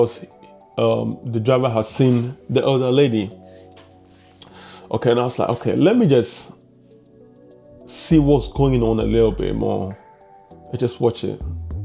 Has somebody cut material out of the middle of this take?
no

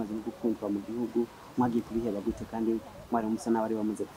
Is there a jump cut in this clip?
no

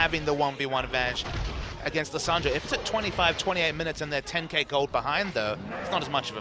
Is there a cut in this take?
no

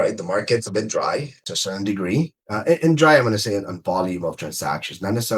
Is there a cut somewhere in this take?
yes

